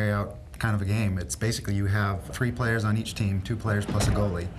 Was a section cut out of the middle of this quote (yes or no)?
yes